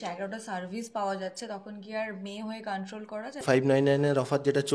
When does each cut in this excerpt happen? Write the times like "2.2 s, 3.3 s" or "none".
3.4 s